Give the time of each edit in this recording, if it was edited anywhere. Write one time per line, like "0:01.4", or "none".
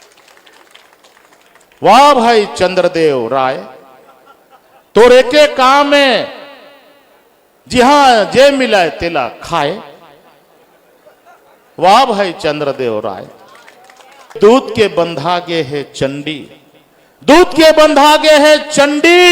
0:14.4